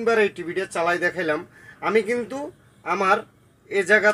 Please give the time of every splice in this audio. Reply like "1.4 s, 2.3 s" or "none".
none